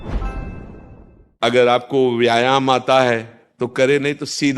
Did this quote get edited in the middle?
yes; 1 cut; at 1.4 s

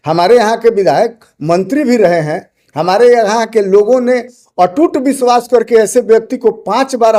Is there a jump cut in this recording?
no; 0 cuts

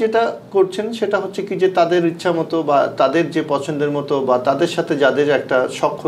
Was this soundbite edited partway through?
no; 0 cuts

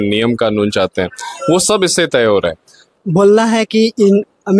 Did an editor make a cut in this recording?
yes; 1 cut; at 2.9 s

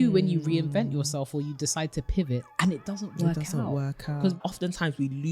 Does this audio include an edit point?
yes; 1 cut; at 4.4 s

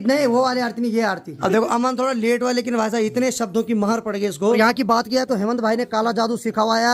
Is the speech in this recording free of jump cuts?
no; 2 cuts; at 1.3 s, 4.6 s

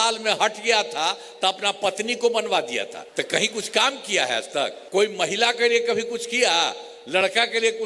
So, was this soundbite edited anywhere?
yes; 2 cuts; at 3.0 s, 4.8 s

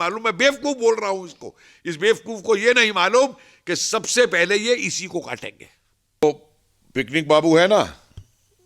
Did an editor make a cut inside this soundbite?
yes; 1 cut; at 6.2 s

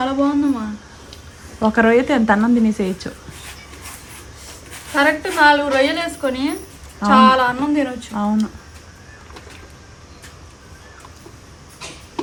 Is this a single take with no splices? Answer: yes; 0 cuts

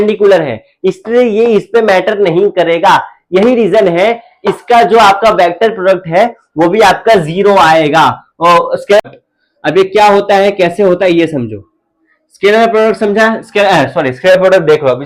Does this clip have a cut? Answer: yes; 1 cut; at 9.0 s

